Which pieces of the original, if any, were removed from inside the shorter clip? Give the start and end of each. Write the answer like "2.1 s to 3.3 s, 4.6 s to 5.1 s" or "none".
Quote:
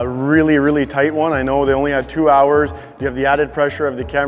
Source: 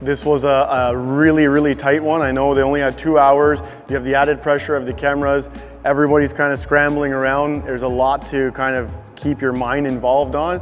none

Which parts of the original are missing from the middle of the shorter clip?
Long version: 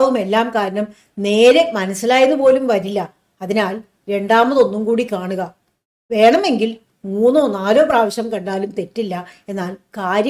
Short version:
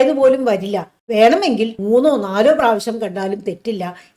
3.2 s to 6.0 s, 6.8 s to 7.1 s

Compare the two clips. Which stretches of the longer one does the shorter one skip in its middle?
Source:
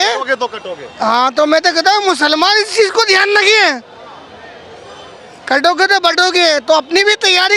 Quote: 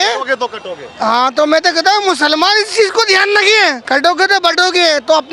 3.8 s to 5.4 s

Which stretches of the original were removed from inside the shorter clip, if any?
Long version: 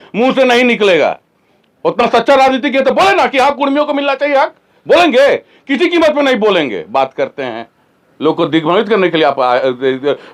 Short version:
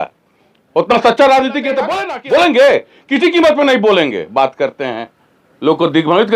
3.0 s to 4.5 s

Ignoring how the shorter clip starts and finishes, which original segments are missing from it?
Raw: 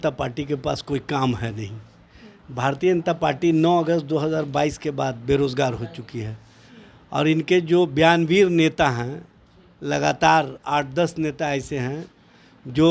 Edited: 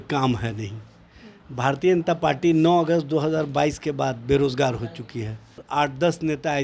6.6 s to 10.6 s

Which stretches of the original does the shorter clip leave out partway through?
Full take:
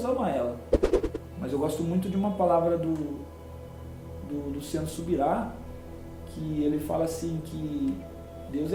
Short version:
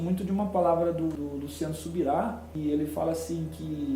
3.0 s to 4.3 s, 5.6 s to 6.4 s

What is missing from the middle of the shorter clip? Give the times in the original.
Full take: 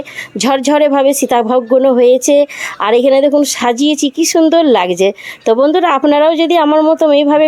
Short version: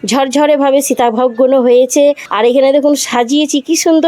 2.6 s to 2.7 s

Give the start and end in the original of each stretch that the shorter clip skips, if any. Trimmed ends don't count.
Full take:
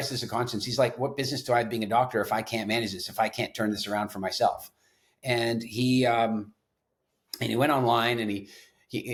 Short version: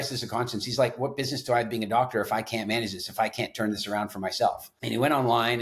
4.7 s to 7.3 s

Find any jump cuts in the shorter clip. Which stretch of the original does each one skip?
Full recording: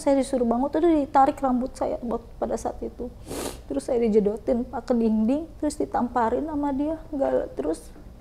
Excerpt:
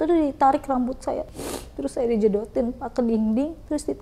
2.0 s to 3.2 s

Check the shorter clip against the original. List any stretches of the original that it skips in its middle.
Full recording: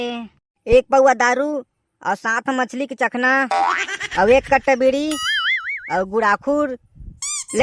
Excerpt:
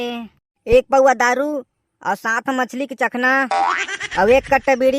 none

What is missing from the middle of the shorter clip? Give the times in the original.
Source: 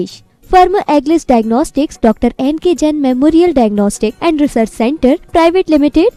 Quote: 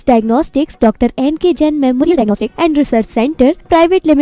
3.2 s to 3.7 s

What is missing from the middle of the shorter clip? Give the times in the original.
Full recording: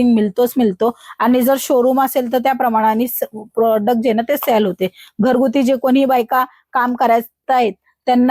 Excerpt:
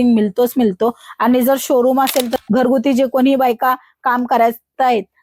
2.3 s to 5.0 s

